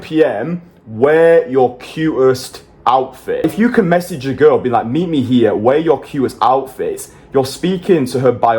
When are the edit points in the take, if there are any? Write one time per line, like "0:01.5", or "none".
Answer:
0:03.4